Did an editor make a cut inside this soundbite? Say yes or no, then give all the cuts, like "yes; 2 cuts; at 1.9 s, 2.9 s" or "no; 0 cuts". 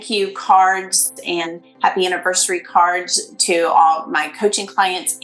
yes; 1 cut; at 1.4 s